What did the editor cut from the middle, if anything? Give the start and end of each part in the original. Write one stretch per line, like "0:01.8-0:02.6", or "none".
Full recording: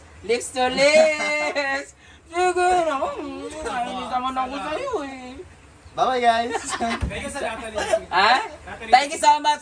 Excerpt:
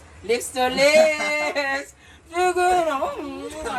none